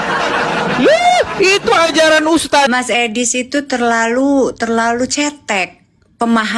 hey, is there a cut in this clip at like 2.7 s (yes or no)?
yes